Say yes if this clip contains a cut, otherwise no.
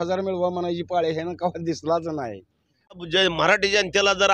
yes